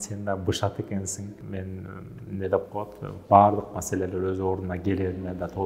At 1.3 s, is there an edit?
yes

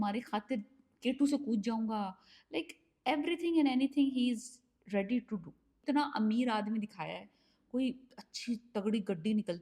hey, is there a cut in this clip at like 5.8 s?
yes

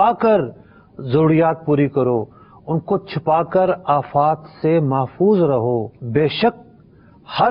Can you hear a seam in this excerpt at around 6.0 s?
yes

